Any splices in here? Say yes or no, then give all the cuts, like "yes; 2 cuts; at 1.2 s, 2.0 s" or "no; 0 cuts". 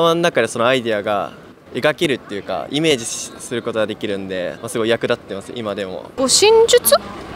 yes; 2 cuts; at 4.6 s, 6.0 s